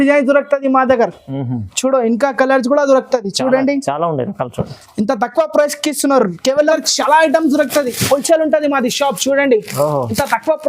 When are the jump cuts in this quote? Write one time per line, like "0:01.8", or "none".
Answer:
0:06.7